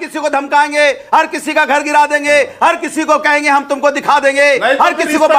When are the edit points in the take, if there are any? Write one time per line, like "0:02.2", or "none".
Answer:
none